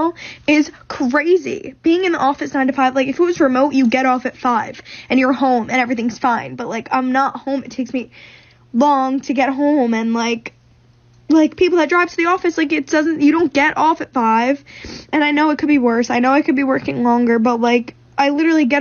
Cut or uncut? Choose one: uncut